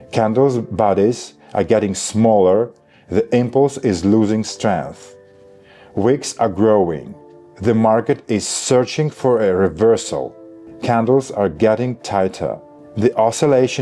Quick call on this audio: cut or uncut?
uncut